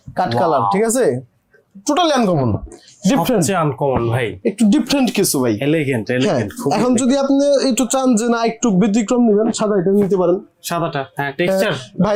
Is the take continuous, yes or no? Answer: yes